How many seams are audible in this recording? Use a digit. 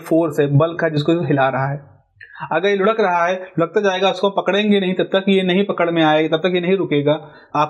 0